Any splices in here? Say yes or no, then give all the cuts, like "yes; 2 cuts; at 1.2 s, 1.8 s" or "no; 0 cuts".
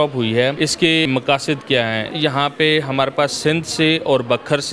yes; 2 cuts; at 1.1 s, 2.1 s